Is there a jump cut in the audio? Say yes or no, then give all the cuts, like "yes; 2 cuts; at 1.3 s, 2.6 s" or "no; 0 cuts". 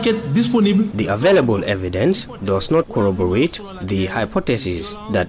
yes; 1 cut; at 0.9 s